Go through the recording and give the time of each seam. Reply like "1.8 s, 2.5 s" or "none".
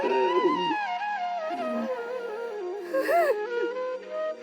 none